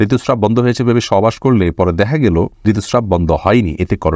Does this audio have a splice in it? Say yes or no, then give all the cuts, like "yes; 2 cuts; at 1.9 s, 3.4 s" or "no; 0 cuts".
yes; 1 cut; at 2.5 s